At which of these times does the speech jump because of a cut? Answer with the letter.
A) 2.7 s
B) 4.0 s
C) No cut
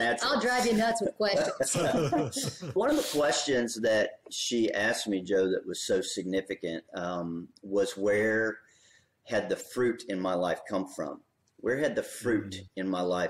A